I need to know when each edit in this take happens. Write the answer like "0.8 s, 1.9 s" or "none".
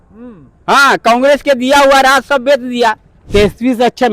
3.1 s